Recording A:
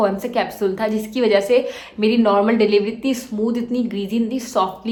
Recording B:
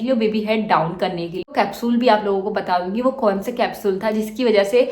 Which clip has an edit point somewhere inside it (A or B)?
B